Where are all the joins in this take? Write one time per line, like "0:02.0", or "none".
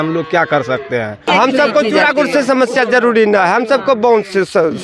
0:01.3